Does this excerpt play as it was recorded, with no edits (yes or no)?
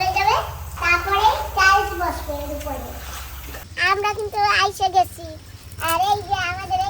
no